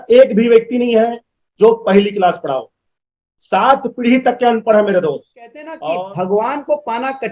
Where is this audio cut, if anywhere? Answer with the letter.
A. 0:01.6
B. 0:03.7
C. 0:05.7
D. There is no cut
C